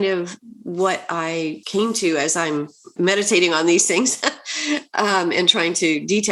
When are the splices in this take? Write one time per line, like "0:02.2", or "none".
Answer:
0:01.6
0:02.8